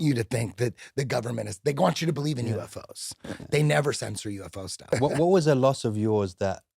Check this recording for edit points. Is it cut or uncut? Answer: cut